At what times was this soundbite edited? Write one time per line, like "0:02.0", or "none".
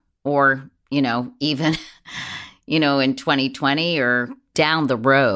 0:04.4